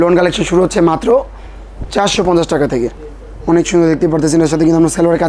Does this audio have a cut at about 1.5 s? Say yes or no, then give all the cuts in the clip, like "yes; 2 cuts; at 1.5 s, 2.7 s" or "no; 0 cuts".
no; 1 cut; at 3.0 s